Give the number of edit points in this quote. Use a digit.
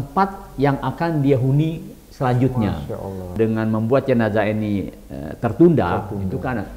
1